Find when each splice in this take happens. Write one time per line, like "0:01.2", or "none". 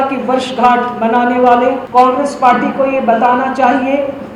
0:01.8